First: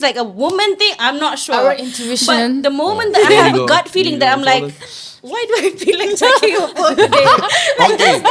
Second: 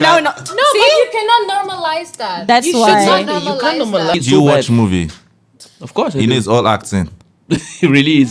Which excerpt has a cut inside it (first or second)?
second